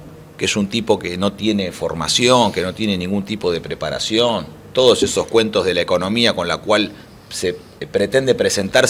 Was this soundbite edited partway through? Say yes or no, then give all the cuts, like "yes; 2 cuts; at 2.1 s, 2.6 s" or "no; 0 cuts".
no; 0 cuts